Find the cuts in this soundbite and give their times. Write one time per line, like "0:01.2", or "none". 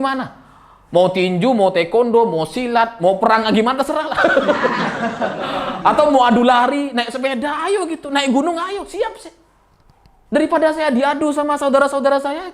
none